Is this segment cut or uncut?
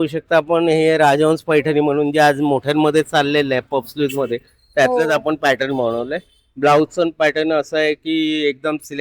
uncut